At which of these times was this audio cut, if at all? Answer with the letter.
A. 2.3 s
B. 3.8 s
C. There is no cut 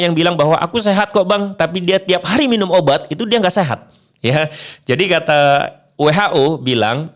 C